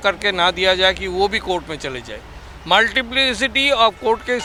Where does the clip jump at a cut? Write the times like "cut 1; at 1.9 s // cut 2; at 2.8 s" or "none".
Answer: none